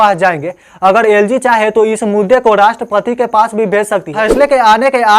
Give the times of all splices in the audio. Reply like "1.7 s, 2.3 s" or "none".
4.2 s